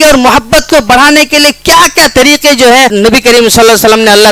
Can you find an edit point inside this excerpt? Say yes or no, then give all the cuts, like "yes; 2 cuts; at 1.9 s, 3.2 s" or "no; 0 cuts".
yes; 1 cut; at 2.9 s